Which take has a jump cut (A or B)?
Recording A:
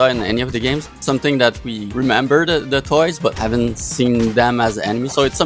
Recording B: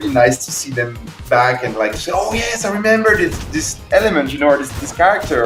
A